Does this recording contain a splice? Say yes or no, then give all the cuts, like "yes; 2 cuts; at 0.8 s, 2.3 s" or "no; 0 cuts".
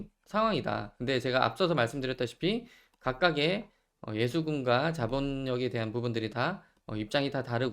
no; 0 cuts